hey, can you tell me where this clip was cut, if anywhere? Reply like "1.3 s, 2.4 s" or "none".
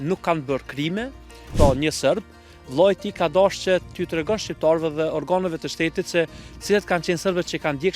1.5 s